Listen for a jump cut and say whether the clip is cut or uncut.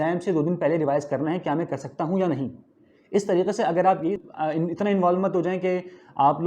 cut